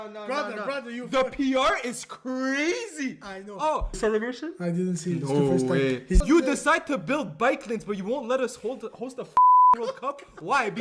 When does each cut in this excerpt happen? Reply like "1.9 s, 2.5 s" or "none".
4.0 s, 6.2 s